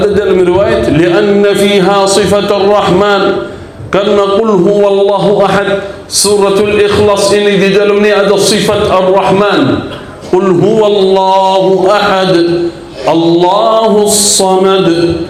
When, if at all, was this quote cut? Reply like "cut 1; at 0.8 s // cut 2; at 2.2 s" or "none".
none